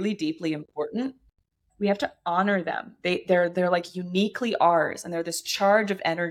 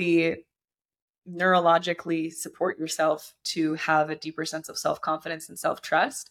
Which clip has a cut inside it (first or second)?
first